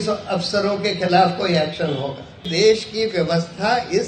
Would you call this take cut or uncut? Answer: cut